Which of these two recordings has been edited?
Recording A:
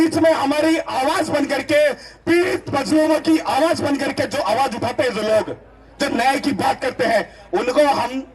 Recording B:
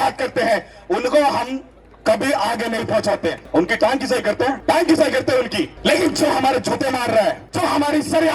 B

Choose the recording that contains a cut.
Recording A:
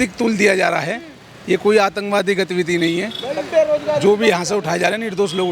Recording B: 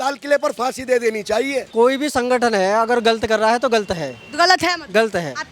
B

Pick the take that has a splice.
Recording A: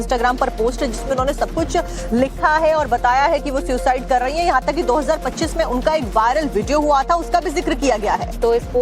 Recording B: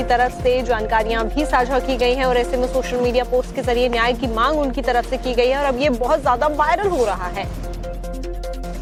A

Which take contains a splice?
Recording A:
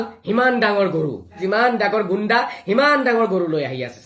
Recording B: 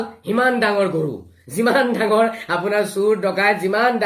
A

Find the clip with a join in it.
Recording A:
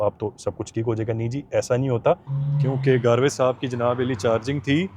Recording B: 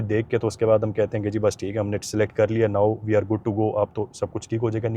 A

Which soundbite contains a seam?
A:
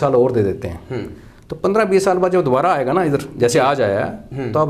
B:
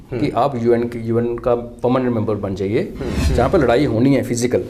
B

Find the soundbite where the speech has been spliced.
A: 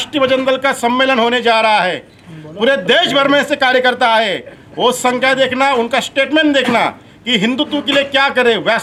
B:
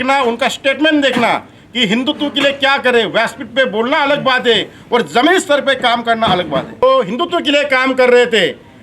B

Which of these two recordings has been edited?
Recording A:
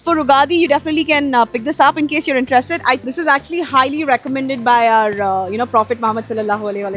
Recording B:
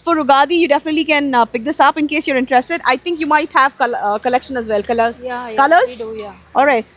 A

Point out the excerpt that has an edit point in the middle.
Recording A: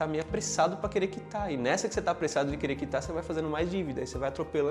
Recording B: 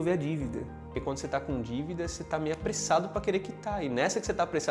B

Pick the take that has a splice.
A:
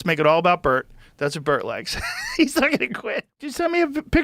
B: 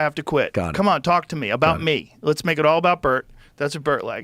A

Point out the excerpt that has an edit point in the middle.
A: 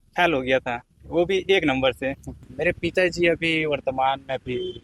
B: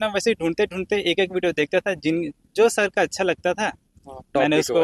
A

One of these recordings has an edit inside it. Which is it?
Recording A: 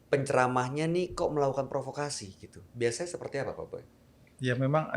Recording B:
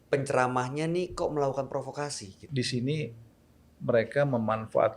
B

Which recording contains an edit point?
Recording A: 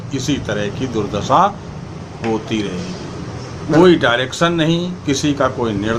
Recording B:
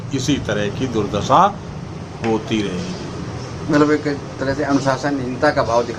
A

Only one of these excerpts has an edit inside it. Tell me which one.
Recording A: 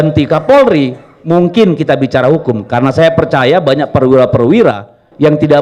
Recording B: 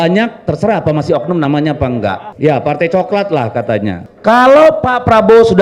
B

